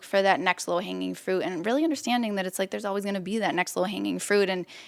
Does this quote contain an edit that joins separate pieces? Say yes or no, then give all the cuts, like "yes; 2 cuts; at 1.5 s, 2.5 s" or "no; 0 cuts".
no; 0 cuts